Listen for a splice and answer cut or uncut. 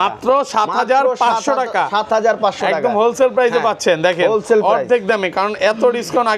uncut